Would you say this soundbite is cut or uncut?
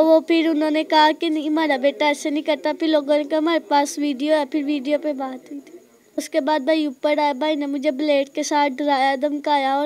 cut